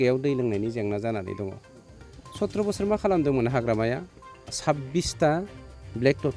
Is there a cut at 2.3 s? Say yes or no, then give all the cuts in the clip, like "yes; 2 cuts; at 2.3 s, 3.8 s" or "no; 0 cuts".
no; 1 cut; at 4.5 s